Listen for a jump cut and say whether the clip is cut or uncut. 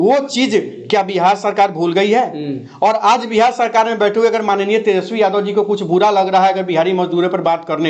uncut